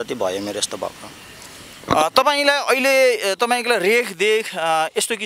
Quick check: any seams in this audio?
no; 0 cuts

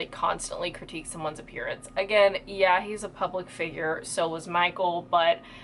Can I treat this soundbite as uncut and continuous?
yes; 0 cuts

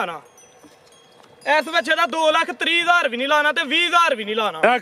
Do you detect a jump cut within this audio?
no; 0 cuts

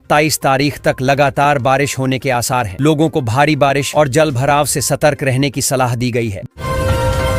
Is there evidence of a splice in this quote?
no; 0 cuts

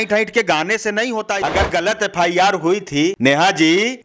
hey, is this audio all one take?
no; 2 cuts; at 1.3 s, 3.2 s

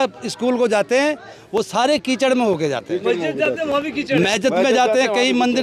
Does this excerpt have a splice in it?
no; 0 cuts

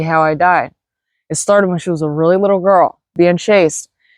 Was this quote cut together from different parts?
yes; 1 cut; at 3.1 s

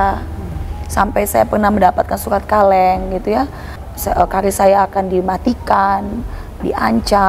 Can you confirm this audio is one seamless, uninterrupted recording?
no; 1 cut; at 3.8 s

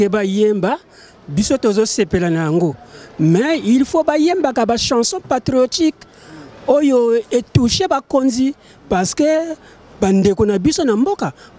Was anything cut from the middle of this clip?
no; 0 cuts

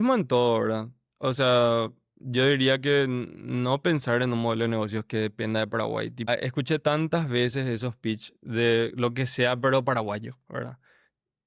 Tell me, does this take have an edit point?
no; 0 cuts

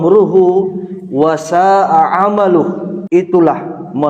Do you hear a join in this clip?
yes; 1 cut; at 2.9 s

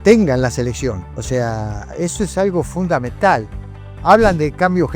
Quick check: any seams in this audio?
yes; 1 cut; at 1.1 s

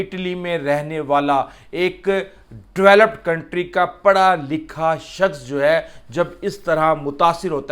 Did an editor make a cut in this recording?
no; 0 cuts

